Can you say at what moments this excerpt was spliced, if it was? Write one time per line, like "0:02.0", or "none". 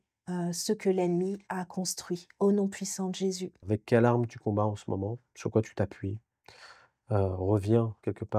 0:03.6